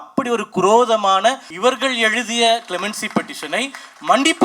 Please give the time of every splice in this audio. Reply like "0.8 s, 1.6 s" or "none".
1.5 s